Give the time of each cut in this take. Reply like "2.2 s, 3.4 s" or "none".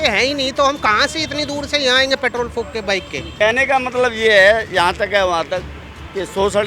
3.4 s